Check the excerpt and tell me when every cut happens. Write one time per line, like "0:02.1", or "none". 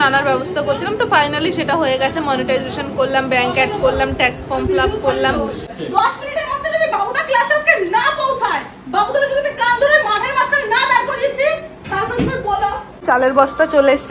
0:05.7
0:13.0